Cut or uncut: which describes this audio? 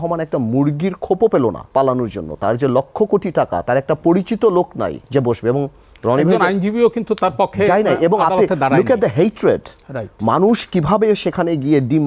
cut